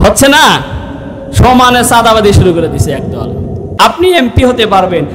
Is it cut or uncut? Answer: cut